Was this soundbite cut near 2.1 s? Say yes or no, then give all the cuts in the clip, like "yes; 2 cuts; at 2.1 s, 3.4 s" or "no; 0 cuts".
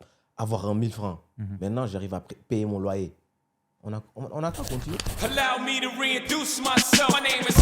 no; 1 cut; at 5.1 s